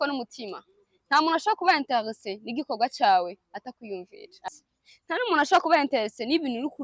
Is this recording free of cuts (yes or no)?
no